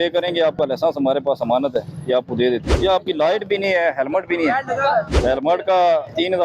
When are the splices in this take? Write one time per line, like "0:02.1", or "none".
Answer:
0:02.7
0:05.1